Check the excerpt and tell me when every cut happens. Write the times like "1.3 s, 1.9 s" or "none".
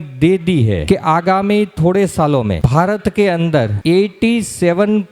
0.8 s, 2.6 s, 3.7 s